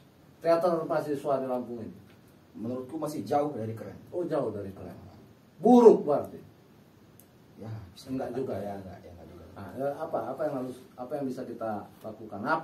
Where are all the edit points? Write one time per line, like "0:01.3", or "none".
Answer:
none